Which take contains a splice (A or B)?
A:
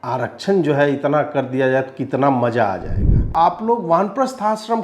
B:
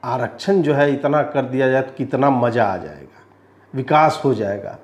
A